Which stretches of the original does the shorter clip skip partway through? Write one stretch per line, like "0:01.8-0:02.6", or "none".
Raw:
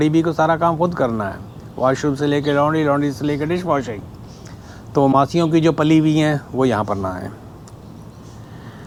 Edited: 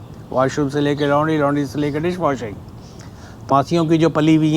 0:05.0-0:05.1